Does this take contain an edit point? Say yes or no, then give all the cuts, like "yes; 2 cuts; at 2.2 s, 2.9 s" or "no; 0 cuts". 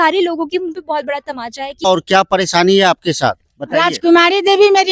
yes; 1 cut; at 1.7 s